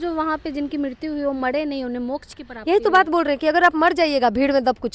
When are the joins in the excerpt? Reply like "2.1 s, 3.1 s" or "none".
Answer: none